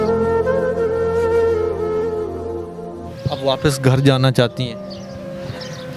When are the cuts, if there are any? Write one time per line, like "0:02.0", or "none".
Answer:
0:03.1